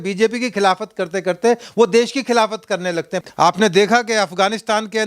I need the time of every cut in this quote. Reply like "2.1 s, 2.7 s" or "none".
3.2 s